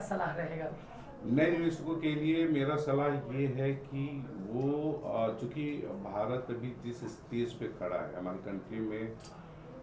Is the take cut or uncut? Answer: uncut